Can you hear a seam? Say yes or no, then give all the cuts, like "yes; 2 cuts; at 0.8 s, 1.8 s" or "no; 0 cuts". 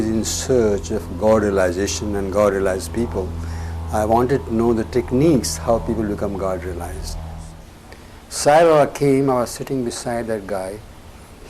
yes; 1 cut; at 7.5 s